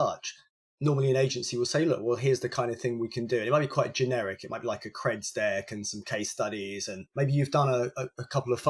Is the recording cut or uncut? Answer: uncut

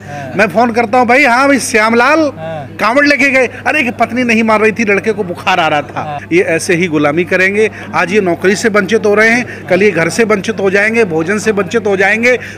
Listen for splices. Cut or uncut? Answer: cut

